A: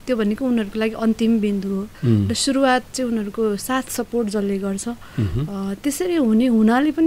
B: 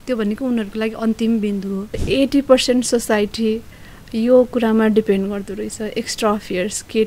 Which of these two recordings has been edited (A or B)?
B